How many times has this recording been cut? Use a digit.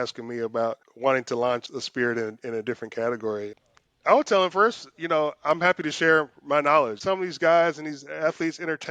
4